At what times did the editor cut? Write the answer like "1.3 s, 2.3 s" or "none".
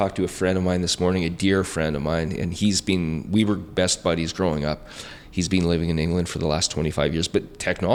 none